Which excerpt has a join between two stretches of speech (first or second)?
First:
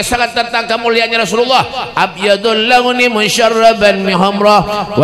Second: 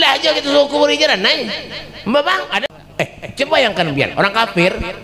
second